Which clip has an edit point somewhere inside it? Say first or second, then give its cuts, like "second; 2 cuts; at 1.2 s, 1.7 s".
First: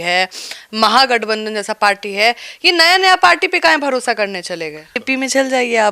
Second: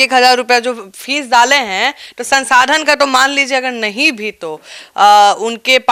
first; 1 cut; at 5.0 s